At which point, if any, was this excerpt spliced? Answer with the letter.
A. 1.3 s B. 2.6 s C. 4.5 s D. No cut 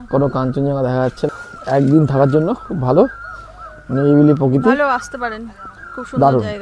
A